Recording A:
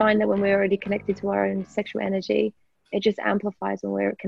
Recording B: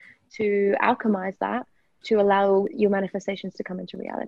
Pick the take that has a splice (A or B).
B